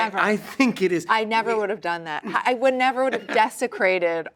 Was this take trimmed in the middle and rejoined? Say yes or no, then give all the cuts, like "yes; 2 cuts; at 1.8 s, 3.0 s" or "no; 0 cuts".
no; 0 cuts